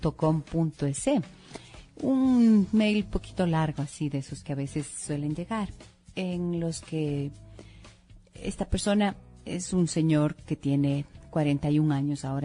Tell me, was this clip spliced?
yes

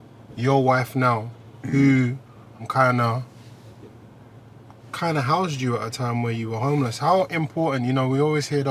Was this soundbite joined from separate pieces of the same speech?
no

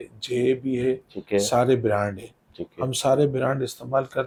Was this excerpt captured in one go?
yes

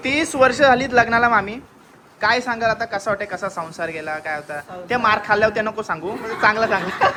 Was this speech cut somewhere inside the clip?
no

